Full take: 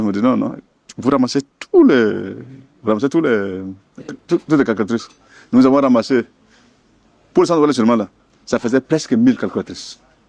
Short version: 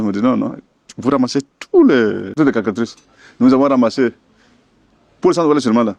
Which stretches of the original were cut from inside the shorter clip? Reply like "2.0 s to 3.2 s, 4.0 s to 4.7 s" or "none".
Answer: 2.3 s to 4.4 s